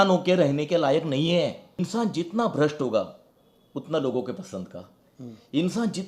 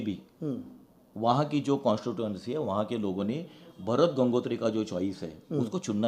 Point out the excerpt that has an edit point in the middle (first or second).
first